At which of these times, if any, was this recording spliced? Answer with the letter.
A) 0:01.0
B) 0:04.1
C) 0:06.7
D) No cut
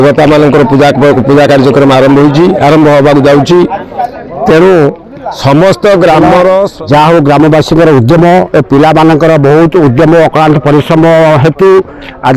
C